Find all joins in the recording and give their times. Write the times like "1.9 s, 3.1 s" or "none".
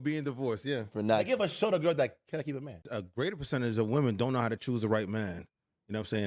3.0 s